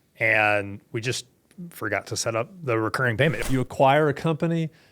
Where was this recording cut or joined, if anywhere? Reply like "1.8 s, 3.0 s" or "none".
3.4 s